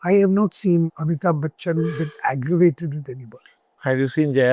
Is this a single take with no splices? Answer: no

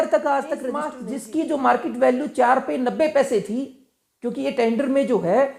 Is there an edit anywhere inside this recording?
yes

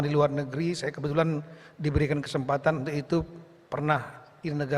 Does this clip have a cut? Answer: no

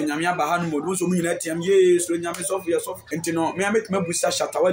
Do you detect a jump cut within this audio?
yes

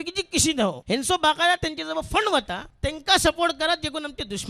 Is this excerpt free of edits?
no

